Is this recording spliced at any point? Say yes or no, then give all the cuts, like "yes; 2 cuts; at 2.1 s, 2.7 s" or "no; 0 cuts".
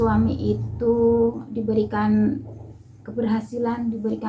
no; 0 cuts